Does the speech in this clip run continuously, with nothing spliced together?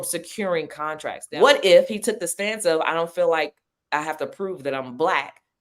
no; 1 cut; at 1.2 s

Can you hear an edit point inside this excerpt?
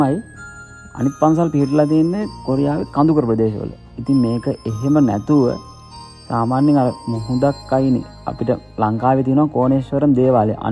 no; 0 cuts

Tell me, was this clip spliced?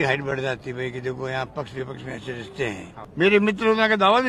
yes; 1 cut; at 3.0 s

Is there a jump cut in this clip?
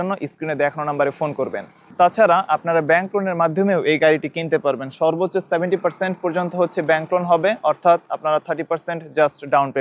no; 0 cuts

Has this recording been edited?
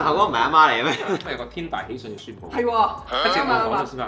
yes; 1 cut; at 1.4 s

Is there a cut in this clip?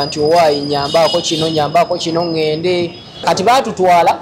yes; 1 cut; at 3.2 s

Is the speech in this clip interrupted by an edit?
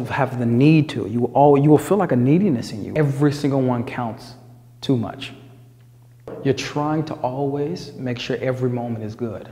yes; 2 cuts; at 2.8 s, 6.3 s

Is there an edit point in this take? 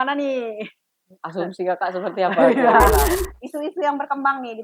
yes; 1 cut; at 2.8 s

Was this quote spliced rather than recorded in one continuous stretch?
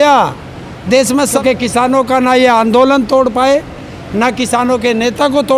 yes; 1 cut; at 1.4 s

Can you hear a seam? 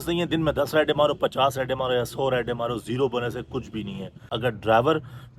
yes; 1 cut; at 4.3 s

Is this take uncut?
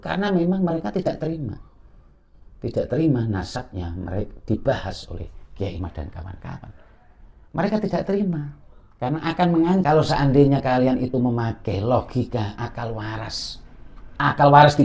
no; 1 cut; at 9.8 s

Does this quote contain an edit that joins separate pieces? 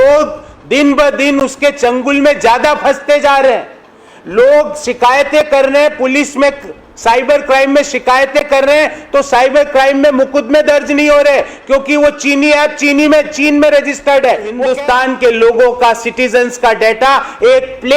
yes; 1 cut; at 14.6 s

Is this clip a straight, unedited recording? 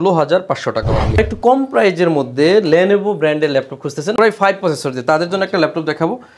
no; 1 cut; at 1.1 s

